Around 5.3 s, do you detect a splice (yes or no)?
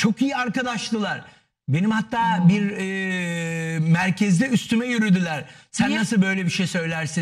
no